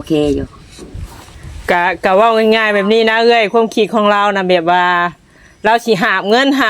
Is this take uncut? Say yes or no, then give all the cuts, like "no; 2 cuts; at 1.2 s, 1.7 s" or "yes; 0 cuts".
no; 1 cut; at 1.4 s